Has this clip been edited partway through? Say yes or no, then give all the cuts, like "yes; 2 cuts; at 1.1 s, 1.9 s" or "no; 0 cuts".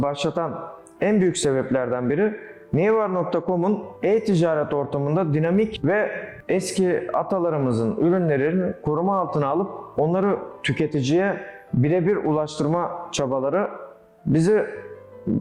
no; 0 cuts